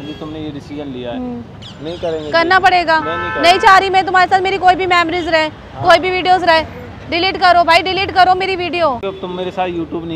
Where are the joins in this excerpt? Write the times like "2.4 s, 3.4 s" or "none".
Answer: 1.5 s, 9.0 s